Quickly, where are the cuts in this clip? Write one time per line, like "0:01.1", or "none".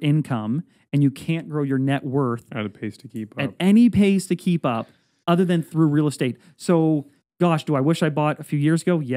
none